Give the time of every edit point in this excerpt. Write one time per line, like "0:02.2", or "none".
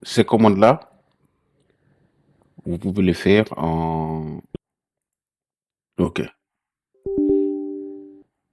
0:04.5